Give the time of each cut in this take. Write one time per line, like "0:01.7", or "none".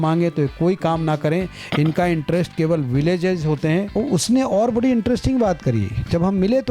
0:03.9